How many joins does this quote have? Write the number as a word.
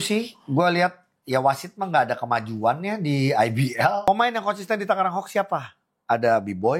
one